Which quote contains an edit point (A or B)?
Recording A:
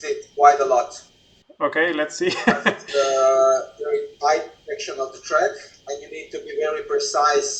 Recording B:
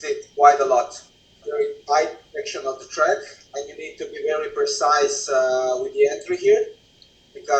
B